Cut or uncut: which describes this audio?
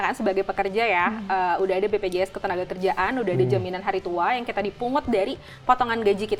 uncut